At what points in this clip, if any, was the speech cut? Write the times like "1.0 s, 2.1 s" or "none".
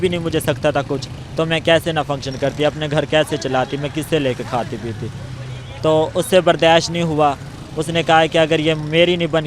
none